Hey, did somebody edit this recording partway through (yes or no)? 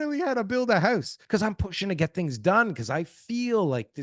yes